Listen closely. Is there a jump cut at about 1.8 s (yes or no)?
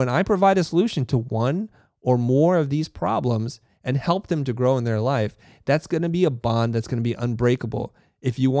no